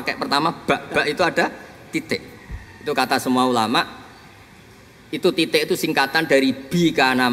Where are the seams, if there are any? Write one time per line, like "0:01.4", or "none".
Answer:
none